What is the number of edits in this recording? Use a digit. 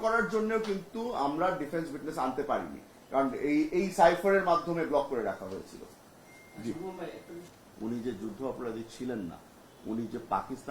1